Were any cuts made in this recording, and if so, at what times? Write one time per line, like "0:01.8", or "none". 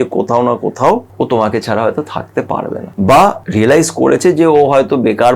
0:01.1
0:02.9
0:03.4